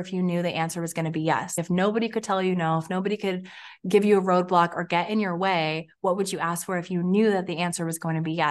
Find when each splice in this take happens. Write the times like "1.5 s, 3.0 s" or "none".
none